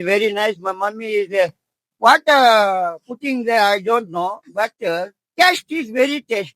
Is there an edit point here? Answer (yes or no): no